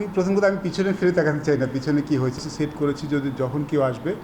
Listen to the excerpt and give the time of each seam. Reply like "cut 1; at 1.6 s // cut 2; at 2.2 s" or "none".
cut 1; at 2.4 s